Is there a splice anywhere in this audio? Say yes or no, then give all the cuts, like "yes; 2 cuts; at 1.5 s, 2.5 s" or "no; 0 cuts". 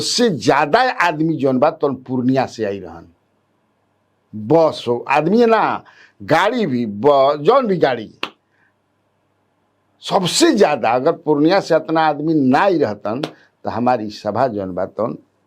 no; 0 cuts